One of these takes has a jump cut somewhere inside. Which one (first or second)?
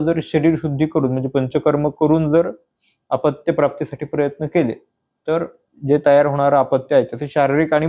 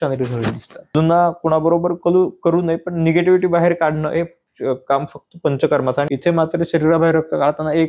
second